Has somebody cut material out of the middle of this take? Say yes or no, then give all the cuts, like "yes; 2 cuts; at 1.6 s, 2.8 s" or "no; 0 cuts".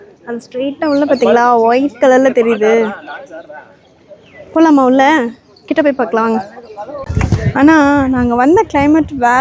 yes; 1 cut; at 7.1 s